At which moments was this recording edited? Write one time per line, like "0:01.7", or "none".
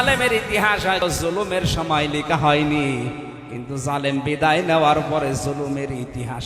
0:01.0